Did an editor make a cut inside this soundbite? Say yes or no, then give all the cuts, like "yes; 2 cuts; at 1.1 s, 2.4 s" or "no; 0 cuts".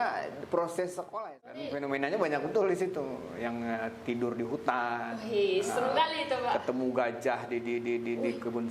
yes; 1 cut; at 1.0 s